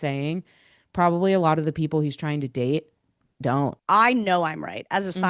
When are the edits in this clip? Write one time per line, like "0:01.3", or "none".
0:03.8